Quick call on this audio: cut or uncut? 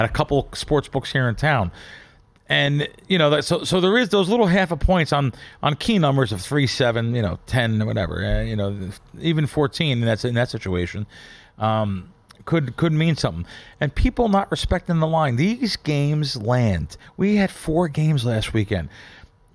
uncut